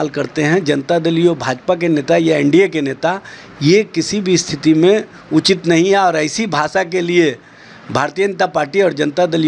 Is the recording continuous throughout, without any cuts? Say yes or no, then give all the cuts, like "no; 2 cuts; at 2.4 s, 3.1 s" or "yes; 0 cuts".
yes; 0 cuts